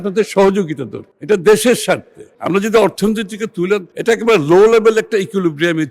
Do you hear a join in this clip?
yes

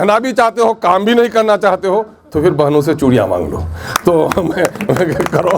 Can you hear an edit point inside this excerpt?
no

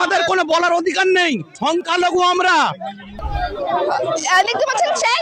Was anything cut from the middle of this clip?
yes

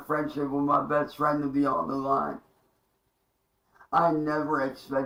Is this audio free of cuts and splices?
yes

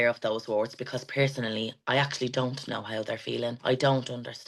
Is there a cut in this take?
yes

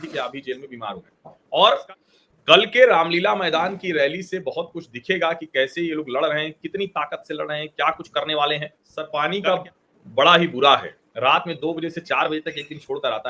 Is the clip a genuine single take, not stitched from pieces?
no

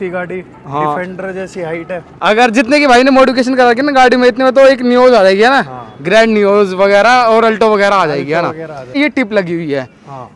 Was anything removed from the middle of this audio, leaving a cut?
yes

